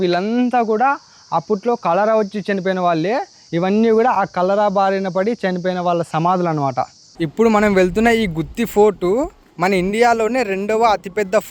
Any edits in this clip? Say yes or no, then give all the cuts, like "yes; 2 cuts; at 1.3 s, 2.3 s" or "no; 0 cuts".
no; 0 cuts